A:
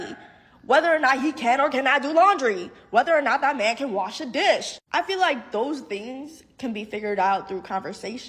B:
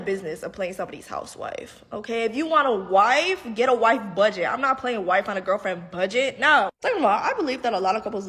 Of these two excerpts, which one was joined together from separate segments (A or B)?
B